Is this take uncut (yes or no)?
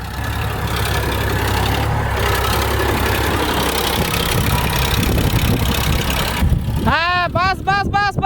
no